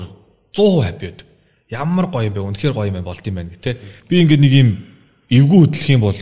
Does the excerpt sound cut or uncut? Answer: cut